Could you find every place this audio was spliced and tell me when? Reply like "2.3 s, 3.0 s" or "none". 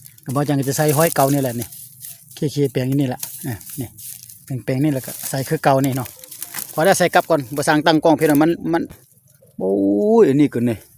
8.9 s